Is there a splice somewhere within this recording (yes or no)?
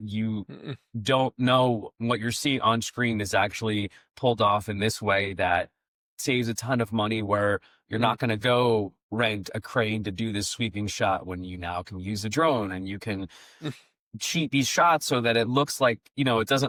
no